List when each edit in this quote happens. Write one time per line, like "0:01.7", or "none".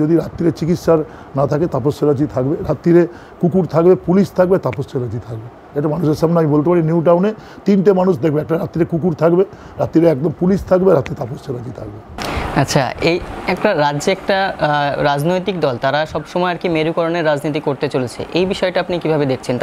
none